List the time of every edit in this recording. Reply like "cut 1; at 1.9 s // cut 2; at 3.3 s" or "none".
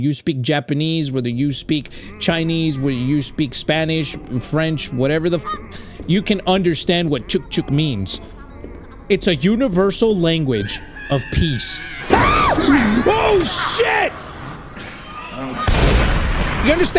none